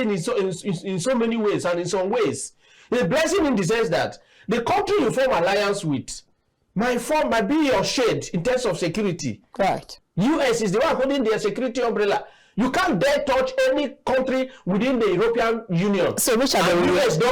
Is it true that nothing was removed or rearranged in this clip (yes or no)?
no